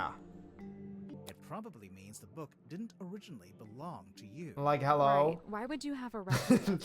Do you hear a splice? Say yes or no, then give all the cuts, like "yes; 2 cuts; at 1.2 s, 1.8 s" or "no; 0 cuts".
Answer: yes; 1 cut; at 1.1 s